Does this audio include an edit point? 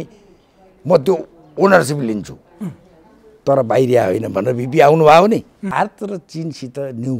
yes; 1 cut; at 5.7 s

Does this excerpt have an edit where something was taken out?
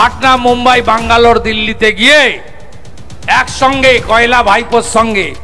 no; 0 cuts

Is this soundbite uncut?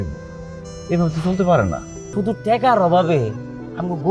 no; 1 cut; at 1.9 s

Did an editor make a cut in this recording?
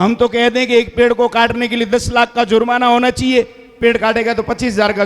yes; 1 cut; at 3.6 s

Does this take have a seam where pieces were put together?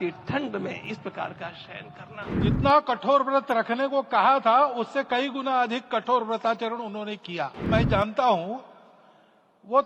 yes; 2 cuts; at 2.3 s, 7.7 s

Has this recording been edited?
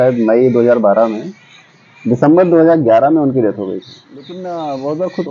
yes; 1 cut; at 4.4 s

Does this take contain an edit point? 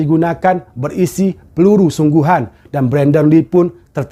no; 0 cuts

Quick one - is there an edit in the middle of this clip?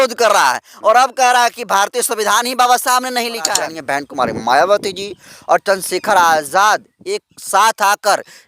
yes; 1 cut; at 3.7 s

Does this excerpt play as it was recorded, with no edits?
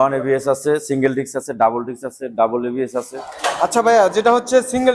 yes; 0 cuts

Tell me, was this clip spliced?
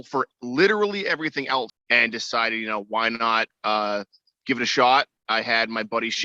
yes; 1 cut; at 1.8 s

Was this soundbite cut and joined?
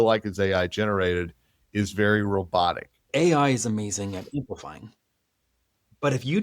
yes; 1 cut; at 3.1 s

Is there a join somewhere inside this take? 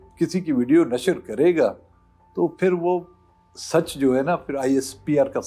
no; 0 cuts

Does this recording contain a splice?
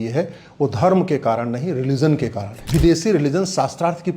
yes; 1 cut; at 2.5 s

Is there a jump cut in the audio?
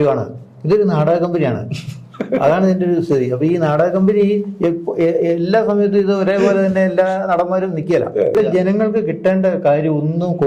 yes; 1 cut; at 8.4 s

